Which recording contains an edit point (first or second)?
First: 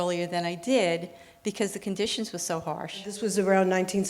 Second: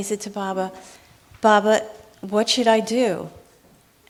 first